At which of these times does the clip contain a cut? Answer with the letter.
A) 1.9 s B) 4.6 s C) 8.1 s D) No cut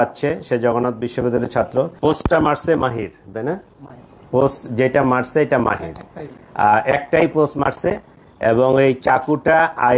A